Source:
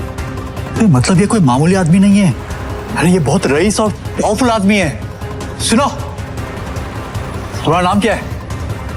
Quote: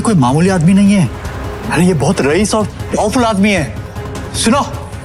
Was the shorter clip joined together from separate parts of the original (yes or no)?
no